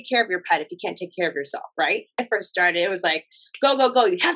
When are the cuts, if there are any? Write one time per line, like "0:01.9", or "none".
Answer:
0:02.2